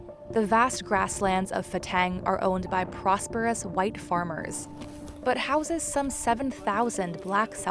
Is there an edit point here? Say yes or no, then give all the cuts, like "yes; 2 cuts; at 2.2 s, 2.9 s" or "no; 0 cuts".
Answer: no; 0 cuts